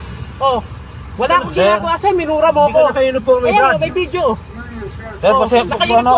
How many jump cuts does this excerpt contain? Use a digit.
1